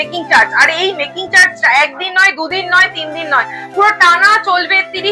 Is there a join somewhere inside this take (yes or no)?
no